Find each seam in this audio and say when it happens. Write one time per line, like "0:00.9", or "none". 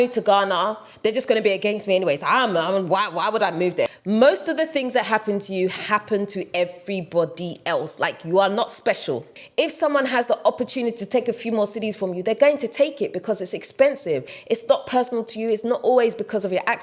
0:03.9
0:09.4
0:14.3